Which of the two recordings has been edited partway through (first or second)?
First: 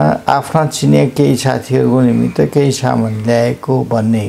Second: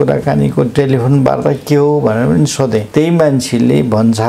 second